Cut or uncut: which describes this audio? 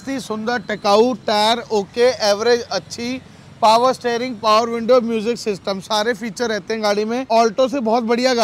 cut